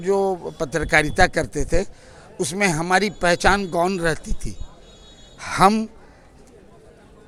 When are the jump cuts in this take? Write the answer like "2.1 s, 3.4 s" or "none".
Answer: none